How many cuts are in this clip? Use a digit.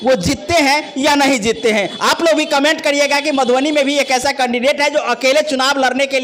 0